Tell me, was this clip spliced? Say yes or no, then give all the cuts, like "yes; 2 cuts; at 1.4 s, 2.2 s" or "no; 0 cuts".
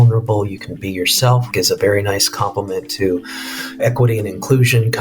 yes; 2 cuts; at 1.5 s, 3.8 s